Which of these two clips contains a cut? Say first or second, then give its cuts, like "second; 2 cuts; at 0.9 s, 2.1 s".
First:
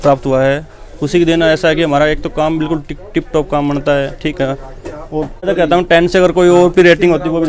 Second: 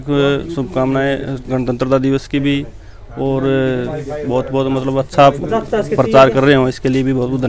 first; 1 cut; at 5.4 s